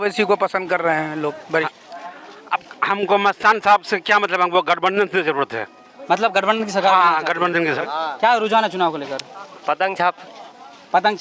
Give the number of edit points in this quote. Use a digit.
2